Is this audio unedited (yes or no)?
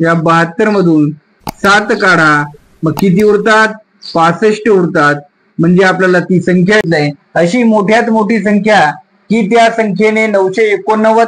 no